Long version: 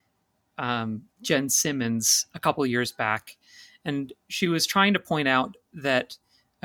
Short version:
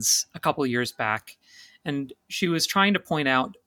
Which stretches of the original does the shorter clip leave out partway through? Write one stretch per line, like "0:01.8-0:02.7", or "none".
none

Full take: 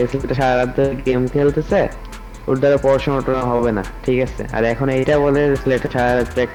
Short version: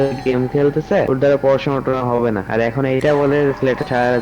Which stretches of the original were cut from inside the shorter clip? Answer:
0:01.9-0:02.5
0:03.9-0:04.5

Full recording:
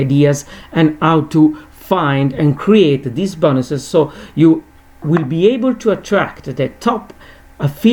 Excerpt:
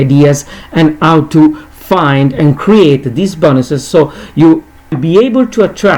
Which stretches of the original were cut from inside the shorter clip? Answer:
0:05.0-0:05.3

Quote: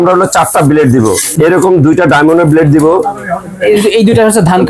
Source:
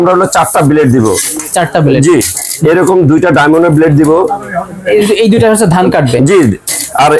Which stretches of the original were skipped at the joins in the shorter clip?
0:01.2-0:02.5

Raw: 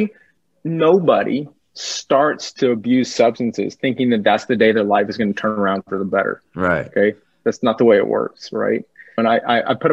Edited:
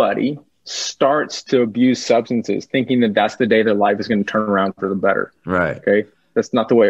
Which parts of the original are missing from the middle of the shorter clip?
none

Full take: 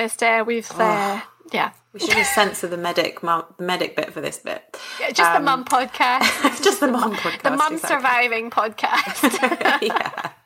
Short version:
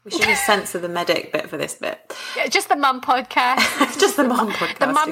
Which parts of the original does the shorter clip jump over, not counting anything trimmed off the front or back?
0:03.1-0:03.9

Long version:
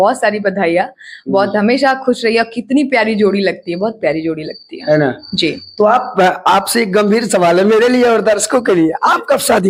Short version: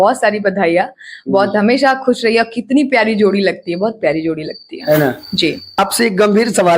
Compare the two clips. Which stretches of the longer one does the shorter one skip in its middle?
0:05.8-0:06.5

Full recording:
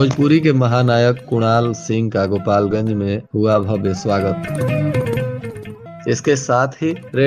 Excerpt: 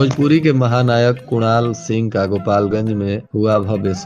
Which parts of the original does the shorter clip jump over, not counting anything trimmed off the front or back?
none

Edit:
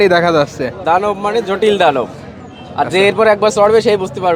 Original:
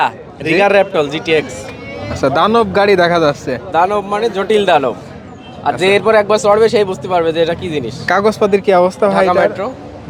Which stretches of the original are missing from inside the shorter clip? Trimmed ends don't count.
none

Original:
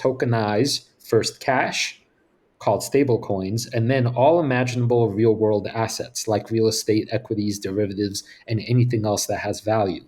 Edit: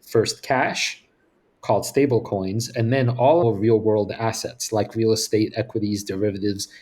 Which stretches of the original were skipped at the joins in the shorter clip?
0:04.4-0:05.0

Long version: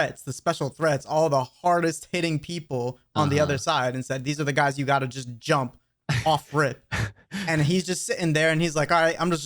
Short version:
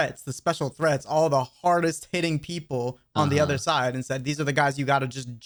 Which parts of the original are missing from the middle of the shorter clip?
none

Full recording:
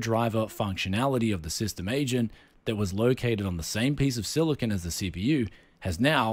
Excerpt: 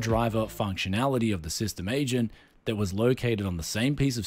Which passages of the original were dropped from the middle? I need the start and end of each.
none

